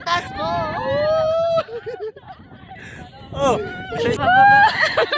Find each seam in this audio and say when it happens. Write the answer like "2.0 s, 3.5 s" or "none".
4.2 s